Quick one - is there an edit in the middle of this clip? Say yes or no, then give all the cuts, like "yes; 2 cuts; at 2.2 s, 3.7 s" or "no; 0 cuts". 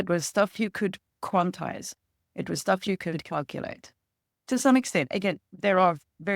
yes; 1 cut; at 5.5 s